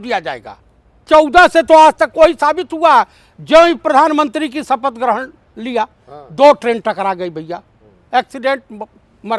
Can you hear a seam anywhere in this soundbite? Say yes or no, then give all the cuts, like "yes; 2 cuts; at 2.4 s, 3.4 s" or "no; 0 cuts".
yes; 1 cut; at 1.1 s